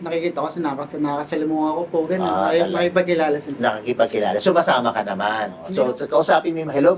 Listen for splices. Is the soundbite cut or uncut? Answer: cut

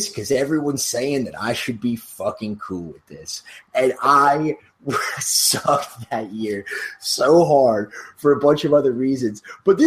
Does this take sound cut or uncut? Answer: uncut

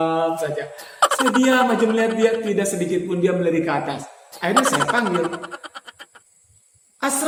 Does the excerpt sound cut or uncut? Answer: uncut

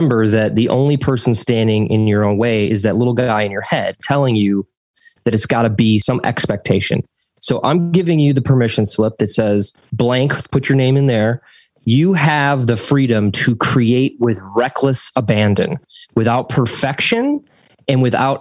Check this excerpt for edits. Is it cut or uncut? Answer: cut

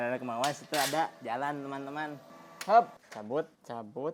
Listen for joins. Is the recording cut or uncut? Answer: uncut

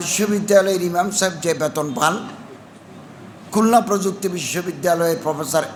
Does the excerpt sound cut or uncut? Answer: uncut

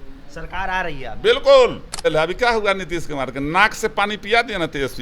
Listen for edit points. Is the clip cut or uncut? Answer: cut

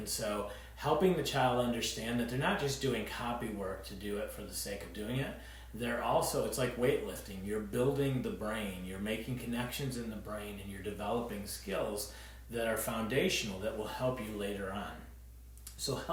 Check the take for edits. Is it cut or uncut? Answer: uncut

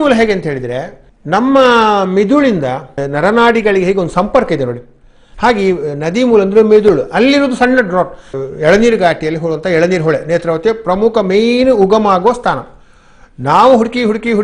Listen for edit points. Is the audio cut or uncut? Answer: cut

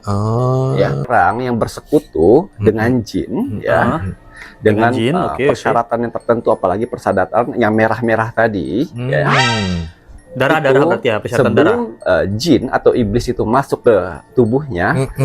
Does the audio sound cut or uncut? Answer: cut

